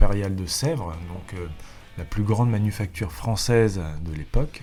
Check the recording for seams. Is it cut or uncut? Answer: uncut